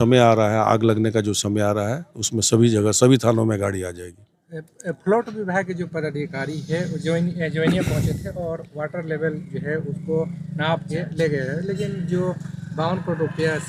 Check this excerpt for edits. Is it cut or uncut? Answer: uncut